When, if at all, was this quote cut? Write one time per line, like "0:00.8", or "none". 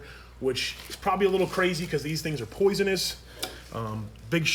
none